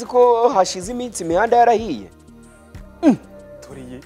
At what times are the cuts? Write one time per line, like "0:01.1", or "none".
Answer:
none